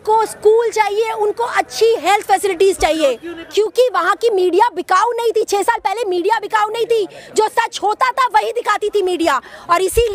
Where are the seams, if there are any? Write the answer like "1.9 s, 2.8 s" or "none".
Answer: 3.3 s

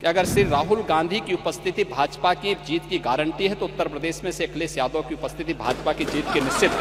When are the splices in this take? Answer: none

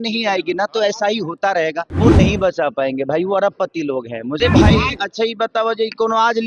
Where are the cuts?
1.9 s, 4.4 s

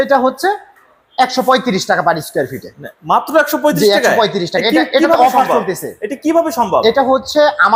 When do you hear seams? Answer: none

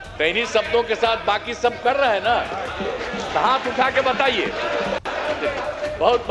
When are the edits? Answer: none

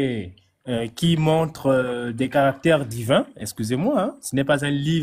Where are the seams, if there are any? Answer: none

